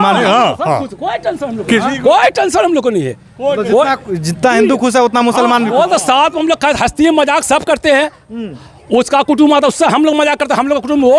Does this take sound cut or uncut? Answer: uncut